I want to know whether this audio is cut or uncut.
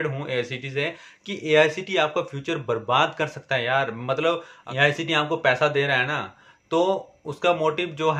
uncut